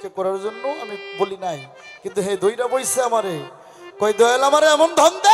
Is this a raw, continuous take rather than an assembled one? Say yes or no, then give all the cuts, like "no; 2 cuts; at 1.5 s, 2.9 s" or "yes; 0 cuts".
yes; 0 cuts